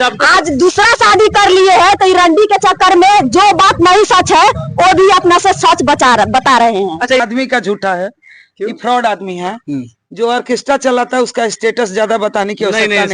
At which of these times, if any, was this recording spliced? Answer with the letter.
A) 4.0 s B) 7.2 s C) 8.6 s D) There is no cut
B